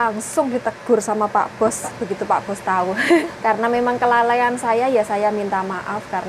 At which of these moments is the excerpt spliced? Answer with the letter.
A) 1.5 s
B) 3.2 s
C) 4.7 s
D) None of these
B